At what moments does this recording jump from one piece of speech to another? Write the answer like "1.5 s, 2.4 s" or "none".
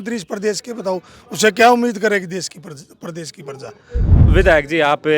4.2 s